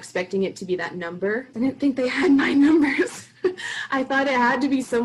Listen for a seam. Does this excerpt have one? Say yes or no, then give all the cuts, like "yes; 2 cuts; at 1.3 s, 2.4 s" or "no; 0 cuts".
yes; 1 cut; at 1.5 s